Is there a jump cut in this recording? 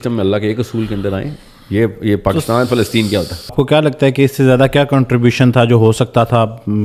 yes; 1 cut; at 3.5 s

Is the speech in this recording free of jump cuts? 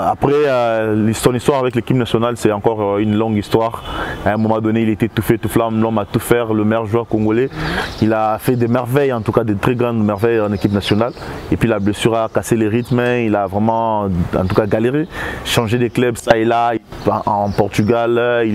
yes; 0 cuts

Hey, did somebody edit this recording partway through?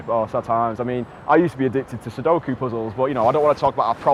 no; 0 cuts

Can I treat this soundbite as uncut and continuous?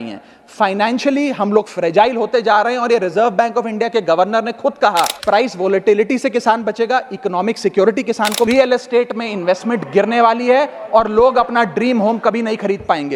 no; 2 cuts; at 5.2 s, 8.5 s

